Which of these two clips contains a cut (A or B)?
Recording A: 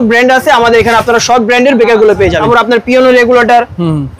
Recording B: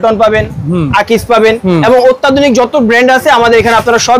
A